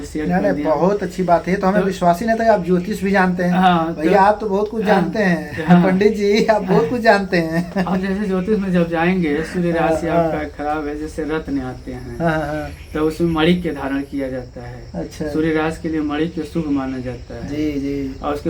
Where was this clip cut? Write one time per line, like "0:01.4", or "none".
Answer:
none